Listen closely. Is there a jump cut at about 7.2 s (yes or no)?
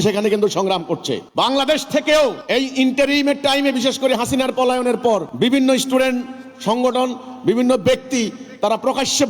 no